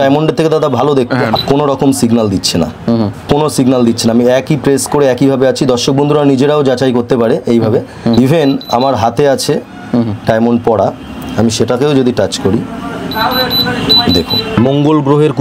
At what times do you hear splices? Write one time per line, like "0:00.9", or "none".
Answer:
0:01.3
0:03.2
0:08.2
0:14.6